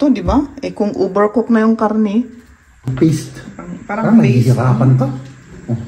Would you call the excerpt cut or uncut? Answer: cut